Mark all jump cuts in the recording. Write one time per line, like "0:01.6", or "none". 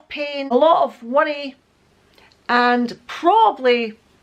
none